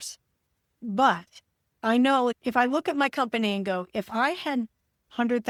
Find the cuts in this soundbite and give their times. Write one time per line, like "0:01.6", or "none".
none